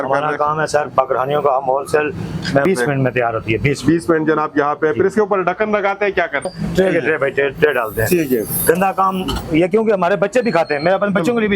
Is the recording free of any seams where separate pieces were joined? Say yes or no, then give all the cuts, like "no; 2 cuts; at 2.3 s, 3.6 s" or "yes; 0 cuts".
no; 2 cuts; at 2.6 s, 6.5 s